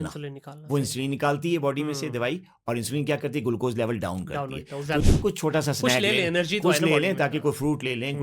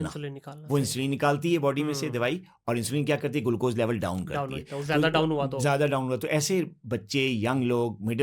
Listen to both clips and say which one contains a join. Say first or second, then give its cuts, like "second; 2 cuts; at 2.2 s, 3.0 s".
first; 1 cut; at 5.0 s